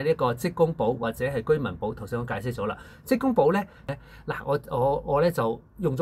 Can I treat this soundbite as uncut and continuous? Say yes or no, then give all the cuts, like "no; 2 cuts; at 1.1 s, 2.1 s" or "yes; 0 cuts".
no; 1 cut; at 3.9 s